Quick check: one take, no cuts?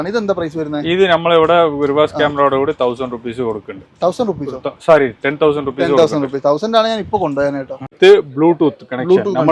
no; 1 cut; at 7.9 s

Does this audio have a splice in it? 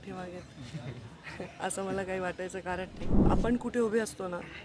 yes; 1 cut; at 3.1 s

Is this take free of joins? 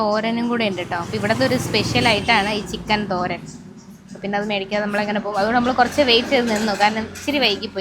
yes; 0 cuts

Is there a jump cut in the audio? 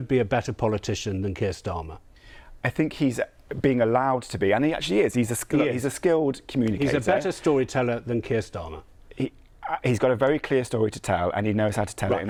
no; 0 cuts

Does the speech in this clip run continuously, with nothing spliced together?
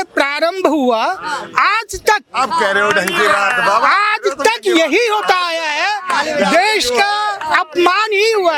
yes; 0 cuts

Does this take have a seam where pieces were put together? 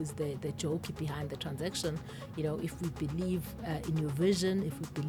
no; 0 cuts

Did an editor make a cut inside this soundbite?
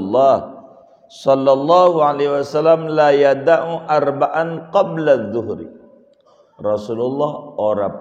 no; 0 cuts

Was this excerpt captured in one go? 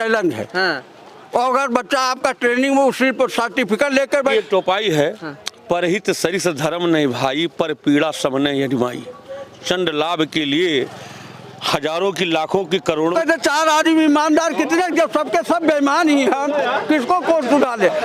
no; 2 cuts; at 4.3 s, 13.1 s

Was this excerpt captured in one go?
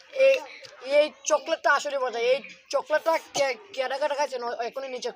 yes; 0 cuts

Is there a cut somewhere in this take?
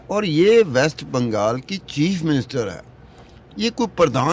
no; 0 cuts

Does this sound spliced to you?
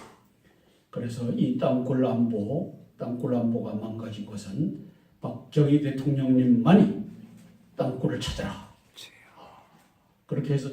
yes; 1 cut; at 4.9 s

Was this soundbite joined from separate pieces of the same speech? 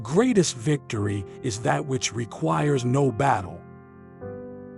no; 0 cuts

